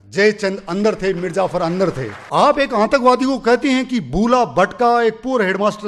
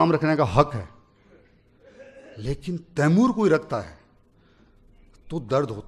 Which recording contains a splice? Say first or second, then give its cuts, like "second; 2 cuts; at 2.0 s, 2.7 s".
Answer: first; 1 cut; at 2.1 s